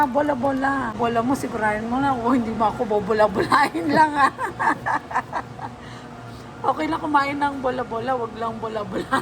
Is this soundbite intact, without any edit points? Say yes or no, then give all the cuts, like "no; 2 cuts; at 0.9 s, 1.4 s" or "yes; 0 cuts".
no; 1 cut; at 1.0 s